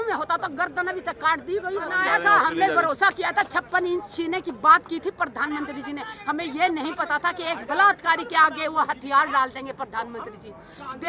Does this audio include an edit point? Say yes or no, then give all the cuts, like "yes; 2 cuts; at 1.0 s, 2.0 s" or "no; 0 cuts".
yes; 1 cut; at 1.9 s